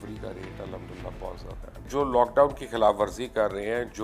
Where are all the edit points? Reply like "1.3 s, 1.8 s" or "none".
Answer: 1.9 s